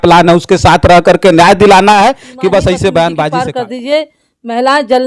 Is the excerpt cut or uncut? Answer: cut